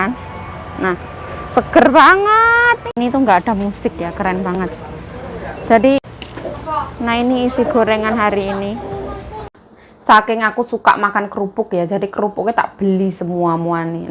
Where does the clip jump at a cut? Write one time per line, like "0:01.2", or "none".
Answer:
0:02.9
0:06.0
0:09.5